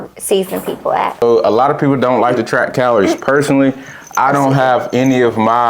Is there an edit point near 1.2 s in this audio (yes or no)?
yes